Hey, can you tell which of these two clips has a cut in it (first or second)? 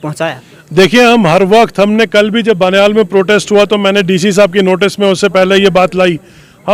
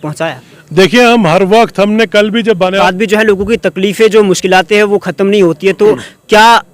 second